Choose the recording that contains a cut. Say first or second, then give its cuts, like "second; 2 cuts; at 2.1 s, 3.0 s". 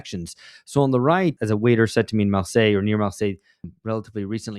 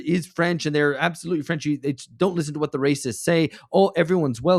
first; 1 cut; at 1.4 s